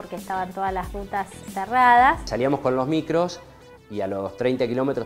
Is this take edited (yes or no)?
yes